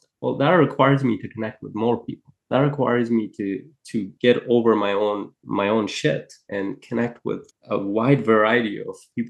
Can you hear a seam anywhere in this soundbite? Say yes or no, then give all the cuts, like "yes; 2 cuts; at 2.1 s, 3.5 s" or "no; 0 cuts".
yes; 3 cuts; at 5.4 s, 6.4 s, 7.5 s